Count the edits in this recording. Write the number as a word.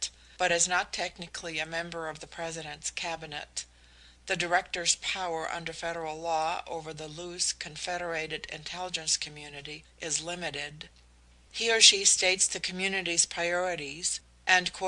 one